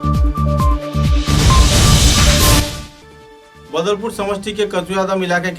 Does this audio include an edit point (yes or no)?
yes